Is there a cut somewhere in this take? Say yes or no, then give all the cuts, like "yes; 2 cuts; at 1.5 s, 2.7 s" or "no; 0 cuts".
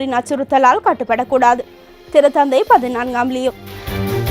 no; 0 cuts